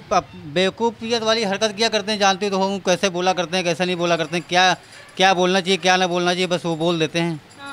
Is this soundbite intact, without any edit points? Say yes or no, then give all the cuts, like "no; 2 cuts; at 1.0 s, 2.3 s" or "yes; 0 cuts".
yes; 0 cuts